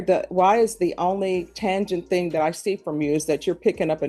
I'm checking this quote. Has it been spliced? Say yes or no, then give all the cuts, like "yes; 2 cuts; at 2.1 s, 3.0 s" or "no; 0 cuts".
no; 0 cuts